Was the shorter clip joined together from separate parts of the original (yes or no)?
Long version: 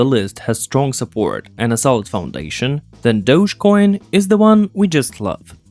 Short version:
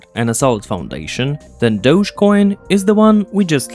no